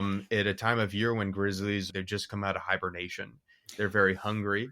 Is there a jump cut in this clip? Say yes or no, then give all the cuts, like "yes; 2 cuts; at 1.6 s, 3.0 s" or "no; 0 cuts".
yes; 1 cut; at 1.9 s